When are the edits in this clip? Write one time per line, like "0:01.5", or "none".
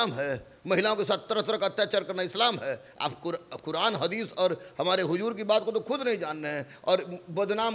none